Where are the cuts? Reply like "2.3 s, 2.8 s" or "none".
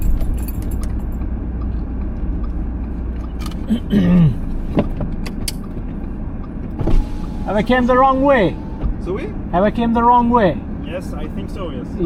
none